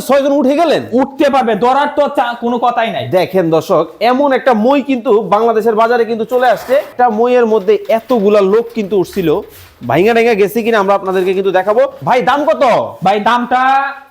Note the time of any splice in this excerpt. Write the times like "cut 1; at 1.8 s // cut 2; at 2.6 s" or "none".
cut 1; at 6.9 s // cut 2; at 12.0 s

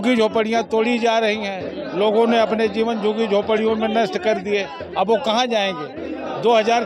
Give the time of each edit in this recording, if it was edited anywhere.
none

